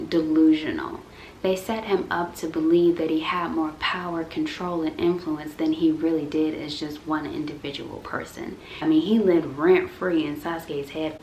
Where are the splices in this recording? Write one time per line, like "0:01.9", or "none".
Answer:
0:08.7